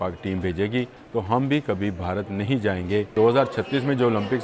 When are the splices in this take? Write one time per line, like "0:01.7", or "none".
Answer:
0:01.0
0:03.1